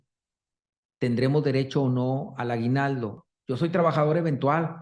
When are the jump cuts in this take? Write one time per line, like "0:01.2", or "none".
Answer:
0:03.2